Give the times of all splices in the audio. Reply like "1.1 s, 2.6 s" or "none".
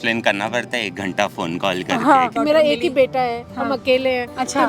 2.5 s